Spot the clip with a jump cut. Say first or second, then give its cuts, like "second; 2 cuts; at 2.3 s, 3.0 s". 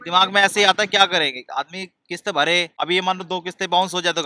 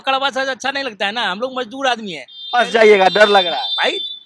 first; 1 cut; at 2.8 s